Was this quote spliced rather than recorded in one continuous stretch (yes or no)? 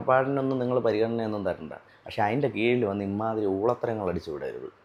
no